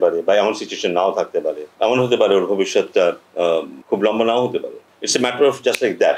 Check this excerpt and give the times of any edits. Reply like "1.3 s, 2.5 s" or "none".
1.7 s, 3.8 s, 4.9 s